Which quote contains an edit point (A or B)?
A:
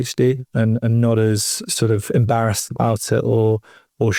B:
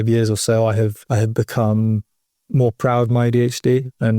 B